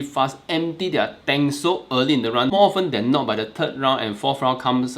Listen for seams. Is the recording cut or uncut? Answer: cut